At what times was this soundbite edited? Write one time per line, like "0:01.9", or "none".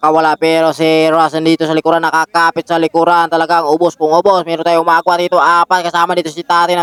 none